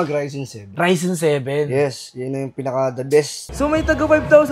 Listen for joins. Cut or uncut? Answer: cut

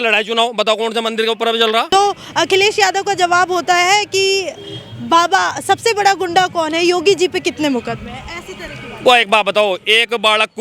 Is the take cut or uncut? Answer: cut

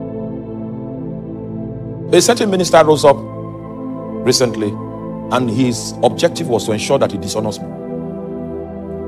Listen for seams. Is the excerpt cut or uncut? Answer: cut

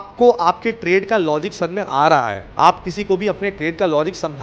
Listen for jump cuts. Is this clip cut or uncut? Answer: uncut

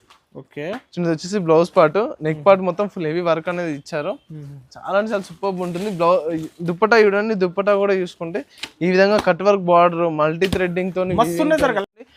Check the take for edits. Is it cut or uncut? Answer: uncut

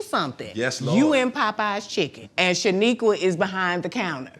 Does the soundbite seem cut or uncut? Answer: cut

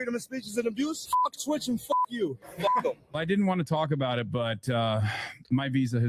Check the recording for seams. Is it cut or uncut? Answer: cut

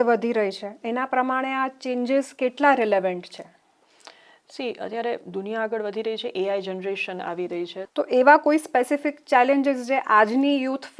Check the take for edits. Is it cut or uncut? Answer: cut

